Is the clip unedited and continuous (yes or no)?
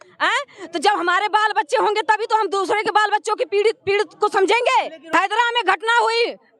no